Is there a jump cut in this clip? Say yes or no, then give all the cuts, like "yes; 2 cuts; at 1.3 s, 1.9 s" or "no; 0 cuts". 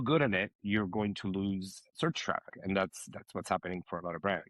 yes; 1 cut; at 2.5 s